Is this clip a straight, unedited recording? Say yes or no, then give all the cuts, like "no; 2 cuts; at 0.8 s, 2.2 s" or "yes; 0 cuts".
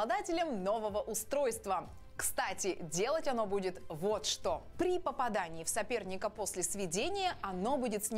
yes; 0 cuts